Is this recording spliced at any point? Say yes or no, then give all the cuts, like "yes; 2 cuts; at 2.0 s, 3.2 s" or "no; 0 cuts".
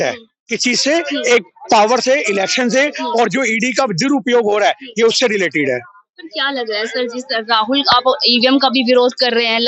no; 0 cuts